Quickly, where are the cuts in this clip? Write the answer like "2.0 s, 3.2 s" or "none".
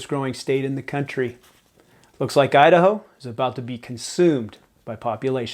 none